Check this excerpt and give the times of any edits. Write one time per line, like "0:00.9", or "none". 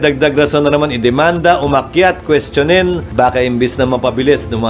0:03.0

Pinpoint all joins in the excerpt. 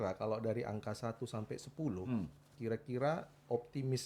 none

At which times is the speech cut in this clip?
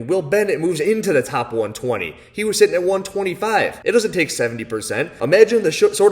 0:05.1

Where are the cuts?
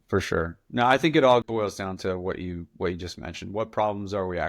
0:01.4

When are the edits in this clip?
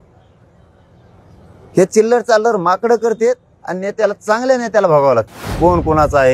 0:05.4

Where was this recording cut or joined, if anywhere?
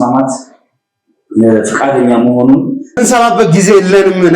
0:03.0

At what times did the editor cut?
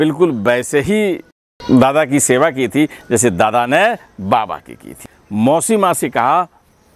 0:05.0

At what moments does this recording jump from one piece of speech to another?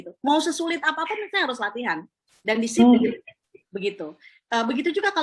none

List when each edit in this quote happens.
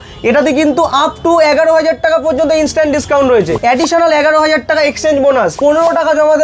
0:03.5
0:05.6

